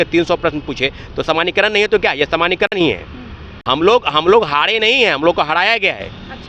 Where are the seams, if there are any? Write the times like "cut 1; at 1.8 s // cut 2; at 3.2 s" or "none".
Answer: none